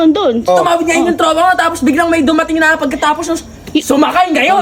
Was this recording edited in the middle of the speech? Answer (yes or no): no